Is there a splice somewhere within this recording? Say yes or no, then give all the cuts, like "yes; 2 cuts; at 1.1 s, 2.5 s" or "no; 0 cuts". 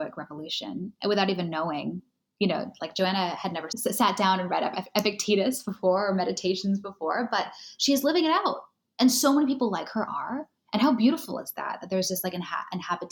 no; 0 cuts